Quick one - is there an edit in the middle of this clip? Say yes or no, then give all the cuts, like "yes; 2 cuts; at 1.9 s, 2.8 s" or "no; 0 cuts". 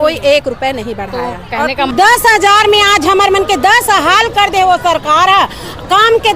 yes; 1 cut; at 1.9 s